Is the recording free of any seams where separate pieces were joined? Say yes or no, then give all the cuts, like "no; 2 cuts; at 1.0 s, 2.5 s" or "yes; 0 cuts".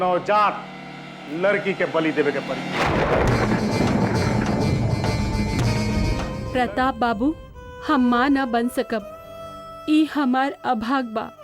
no; 1 cut; at 6.3 s